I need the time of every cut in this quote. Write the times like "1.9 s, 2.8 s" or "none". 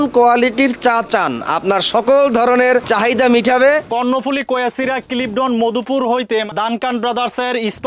2.9 s, 3.9 s, 6.5 s